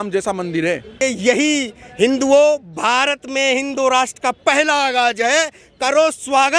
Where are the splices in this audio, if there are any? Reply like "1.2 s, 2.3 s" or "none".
1.0 s

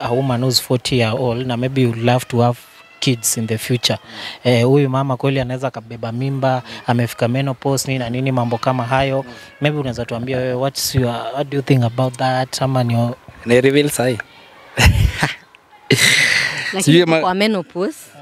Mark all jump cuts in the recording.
none

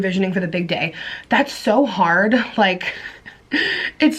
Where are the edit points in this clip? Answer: none

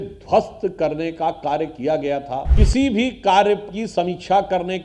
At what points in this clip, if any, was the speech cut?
2.5 s

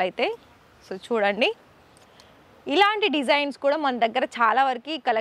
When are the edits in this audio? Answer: none

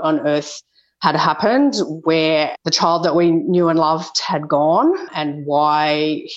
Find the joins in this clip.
2.5 s

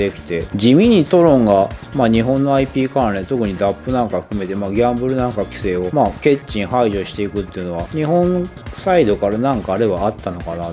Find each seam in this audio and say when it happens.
none

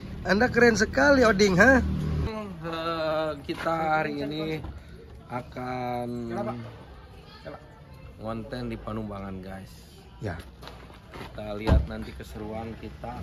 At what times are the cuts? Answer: 2.3 s

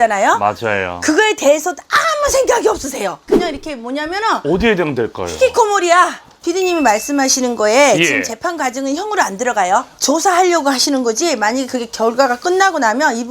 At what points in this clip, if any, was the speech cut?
3.3 s, 6.3 s

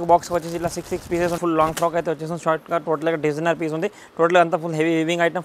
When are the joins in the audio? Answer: 1.4 s

